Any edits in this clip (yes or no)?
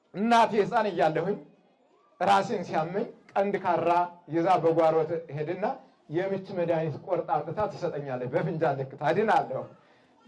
no